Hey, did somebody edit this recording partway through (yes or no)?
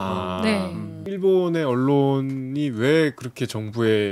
yes